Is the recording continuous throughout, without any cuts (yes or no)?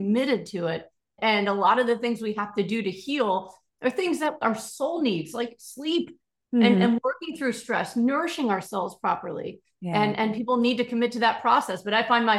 no